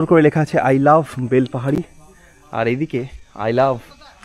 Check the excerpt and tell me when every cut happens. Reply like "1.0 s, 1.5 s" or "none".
none